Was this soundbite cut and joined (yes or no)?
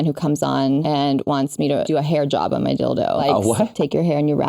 yes